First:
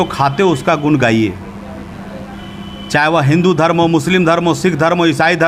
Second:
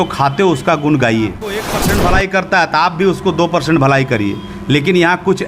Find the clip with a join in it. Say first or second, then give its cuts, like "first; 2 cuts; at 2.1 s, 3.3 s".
second; 1 cut; at 1.7 s